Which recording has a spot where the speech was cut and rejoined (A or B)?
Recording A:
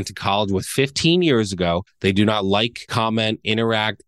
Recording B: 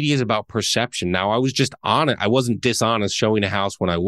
A